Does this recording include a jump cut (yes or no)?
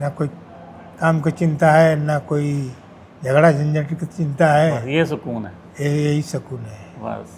no